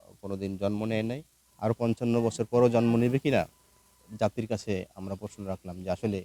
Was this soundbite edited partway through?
no; 0 cuts

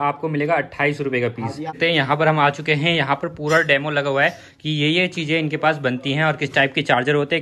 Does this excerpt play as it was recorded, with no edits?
no; 1 cut; at 1.7 s

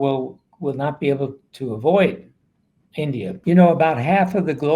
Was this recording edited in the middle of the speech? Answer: yes; 1 cut; at 3.3 s

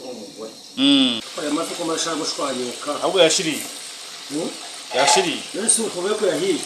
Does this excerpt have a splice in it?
yes; 1 cut; at 1.2 s

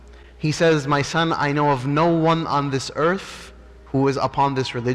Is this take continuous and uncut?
yes; 0 cuts

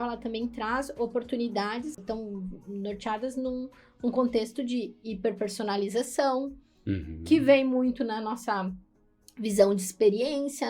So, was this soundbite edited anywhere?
yes; 1 cut; at 2.0 s

